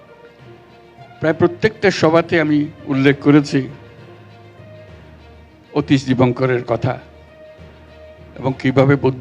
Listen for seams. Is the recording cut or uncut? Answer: cut